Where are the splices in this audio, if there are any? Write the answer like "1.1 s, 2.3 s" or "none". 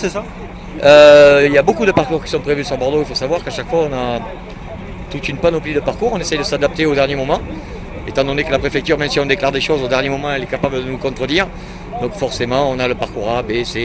none